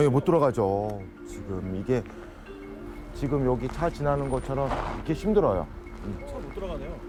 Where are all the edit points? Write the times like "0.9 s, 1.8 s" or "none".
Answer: none